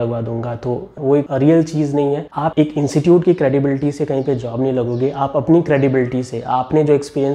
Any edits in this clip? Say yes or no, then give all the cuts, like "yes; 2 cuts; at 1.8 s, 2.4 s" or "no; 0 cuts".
yes; 1 cut; at 2.2 s